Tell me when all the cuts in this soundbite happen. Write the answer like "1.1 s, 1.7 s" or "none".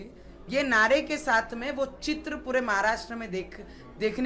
none